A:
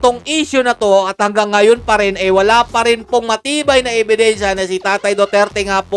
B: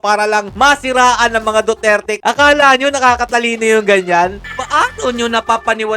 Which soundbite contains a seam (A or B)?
B